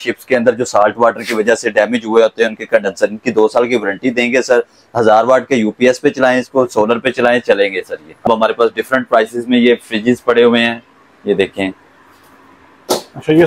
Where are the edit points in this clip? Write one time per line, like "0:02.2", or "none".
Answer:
0:08.2